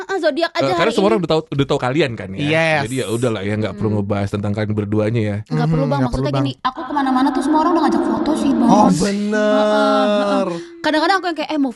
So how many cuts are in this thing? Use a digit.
0